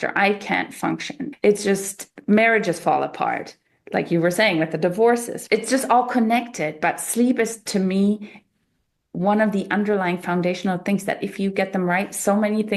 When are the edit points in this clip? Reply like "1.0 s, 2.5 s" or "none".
1.2 s, 5.3 s

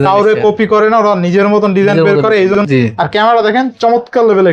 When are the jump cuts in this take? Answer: 2.6 s

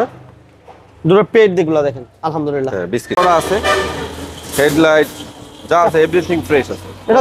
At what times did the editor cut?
3.1 s

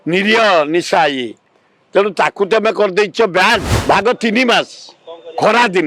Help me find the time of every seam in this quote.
3.7 s

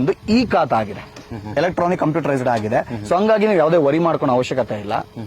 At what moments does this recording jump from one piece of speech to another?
none

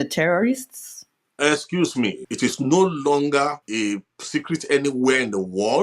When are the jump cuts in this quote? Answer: 2.2 s, 3.6 s

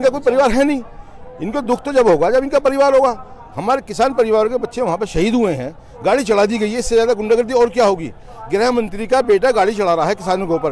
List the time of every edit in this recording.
none

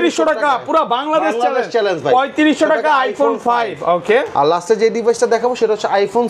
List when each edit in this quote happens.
none

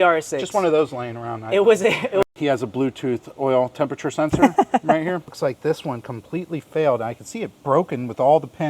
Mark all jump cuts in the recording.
2.2 s, 5.3 s

